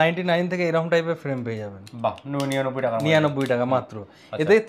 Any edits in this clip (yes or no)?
no